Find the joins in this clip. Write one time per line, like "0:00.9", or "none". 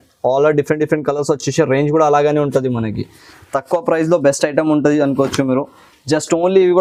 none